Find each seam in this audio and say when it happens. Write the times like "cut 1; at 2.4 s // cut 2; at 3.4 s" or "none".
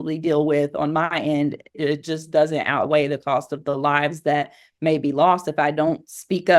cut 1; at 1.8 s